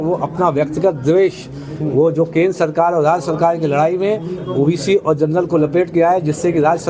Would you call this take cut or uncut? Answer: cut